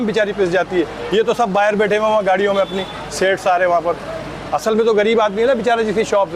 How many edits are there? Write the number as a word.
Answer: zero